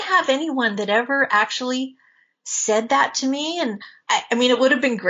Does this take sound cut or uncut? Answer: cut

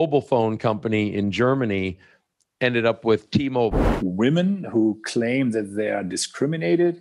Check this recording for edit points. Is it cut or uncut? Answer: cut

